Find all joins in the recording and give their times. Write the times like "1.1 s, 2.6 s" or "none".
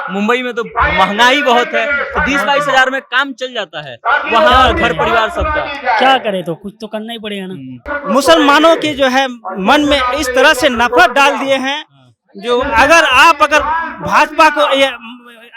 7.9 s